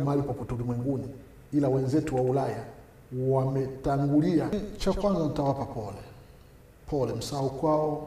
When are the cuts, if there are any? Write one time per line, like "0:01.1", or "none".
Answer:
0:04.6